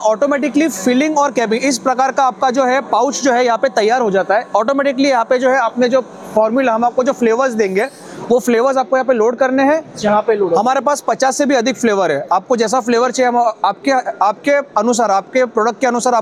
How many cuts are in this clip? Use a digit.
0